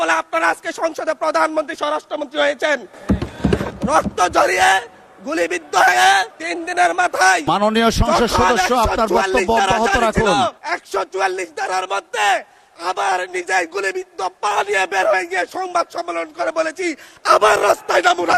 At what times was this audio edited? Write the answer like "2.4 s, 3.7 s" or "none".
none